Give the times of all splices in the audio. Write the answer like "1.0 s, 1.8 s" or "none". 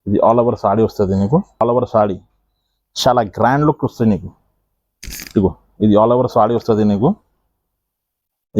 1.6 s